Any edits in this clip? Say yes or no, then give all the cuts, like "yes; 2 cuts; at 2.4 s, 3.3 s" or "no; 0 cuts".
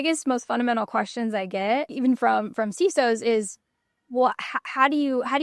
yes; 1 cut; at 1.9 s